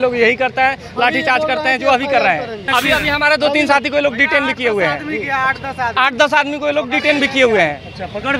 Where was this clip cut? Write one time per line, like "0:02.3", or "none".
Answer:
0:02.6